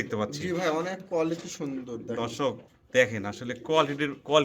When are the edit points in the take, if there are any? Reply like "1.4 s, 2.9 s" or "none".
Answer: none

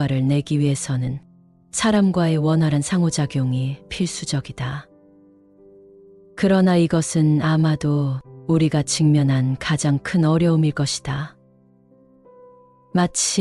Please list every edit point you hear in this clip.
none

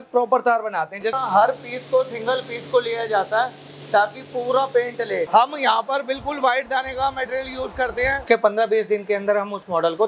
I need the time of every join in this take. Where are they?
1.1 s, 5.3 s, 8.2 s

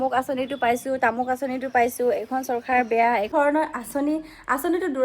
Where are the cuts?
3.3 s

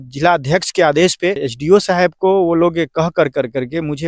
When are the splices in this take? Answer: 1.5 s

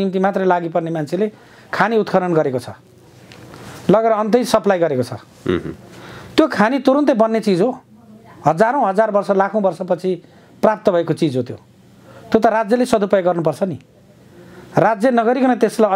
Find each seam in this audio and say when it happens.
none

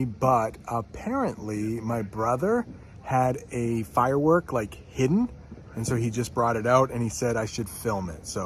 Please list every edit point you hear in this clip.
none

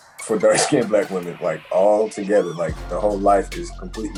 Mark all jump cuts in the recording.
none

